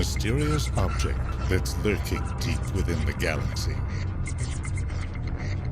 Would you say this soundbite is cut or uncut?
cut